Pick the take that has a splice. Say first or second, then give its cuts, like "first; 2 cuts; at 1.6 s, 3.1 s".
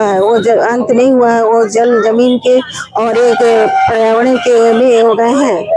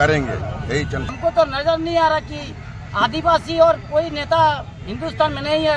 second; 1 cut; at 1.1 s